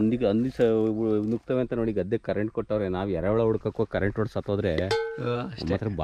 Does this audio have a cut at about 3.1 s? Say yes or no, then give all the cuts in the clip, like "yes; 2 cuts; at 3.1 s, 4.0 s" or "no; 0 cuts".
no; 0 cuts